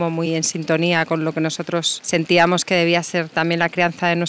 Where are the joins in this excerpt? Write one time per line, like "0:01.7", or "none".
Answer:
none